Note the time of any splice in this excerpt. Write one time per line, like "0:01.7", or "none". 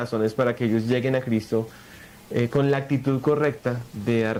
none